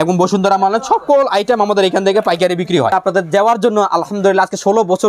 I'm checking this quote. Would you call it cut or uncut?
cut